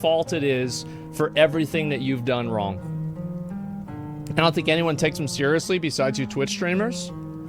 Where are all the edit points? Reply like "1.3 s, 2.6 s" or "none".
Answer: none